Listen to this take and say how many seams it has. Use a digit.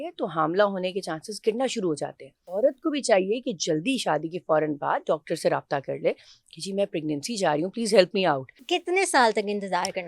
2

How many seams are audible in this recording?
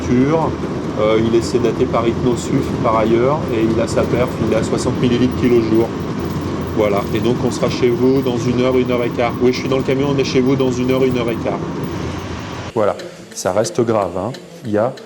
1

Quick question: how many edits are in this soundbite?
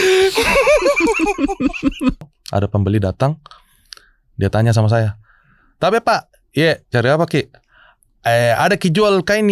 1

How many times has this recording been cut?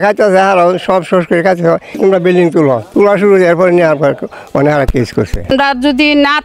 1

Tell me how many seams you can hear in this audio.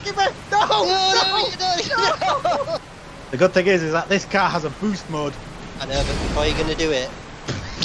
1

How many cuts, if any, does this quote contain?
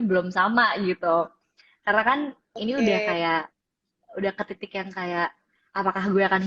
0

